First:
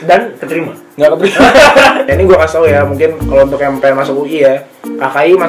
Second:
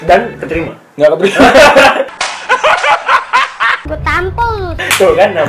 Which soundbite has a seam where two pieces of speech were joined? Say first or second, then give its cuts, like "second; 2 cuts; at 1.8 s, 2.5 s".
first; 1 cut; at 2.0 s